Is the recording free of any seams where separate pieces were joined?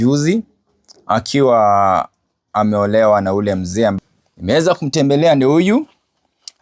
no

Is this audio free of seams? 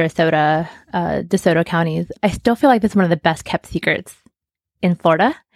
no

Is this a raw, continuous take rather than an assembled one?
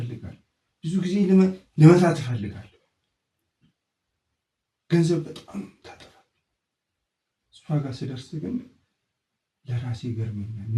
yes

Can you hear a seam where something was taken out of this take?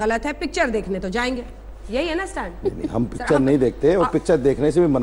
no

